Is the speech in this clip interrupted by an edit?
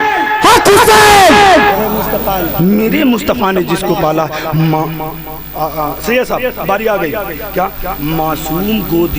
yes; 1 cut; at 1.7 s

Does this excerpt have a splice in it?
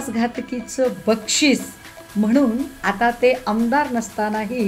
no; 0 cuts

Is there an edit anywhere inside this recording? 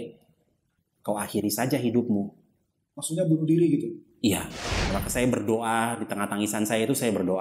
yes; 1 cut; at 4.6 s

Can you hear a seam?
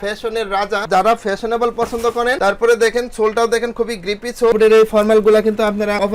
yes; 3 cuts; at 0.9 s, 2.4 s, 4.5 s

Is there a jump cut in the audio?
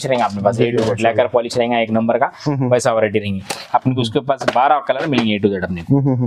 yes; 1 cut; at 3.5 s

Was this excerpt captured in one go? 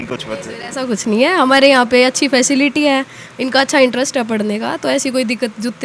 yes; 0 cuts

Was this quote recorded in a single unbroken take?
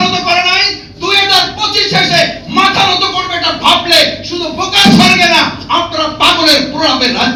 yes; 0 cuts

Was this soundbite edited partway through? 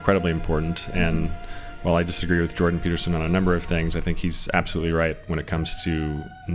no; 0 cuts

